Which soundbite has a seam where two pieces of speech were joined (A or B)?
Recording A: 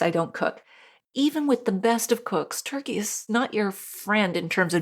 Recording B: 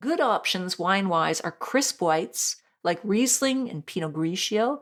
A